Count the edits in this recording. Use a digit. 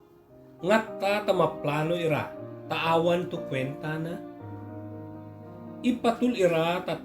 2